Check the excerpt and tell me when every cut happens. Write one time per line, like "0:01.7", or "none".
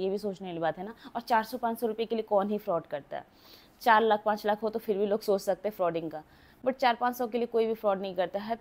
none